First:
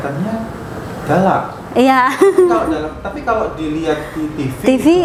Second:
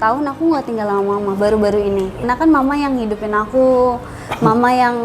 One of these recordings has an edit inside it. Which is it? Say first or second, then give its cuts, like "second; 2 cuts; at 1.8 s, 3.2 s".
second; 1 cut; at 2.2 s